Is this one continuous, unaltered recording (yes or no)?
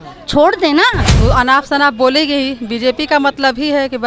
no